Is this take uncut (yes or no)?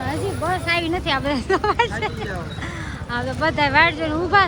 yes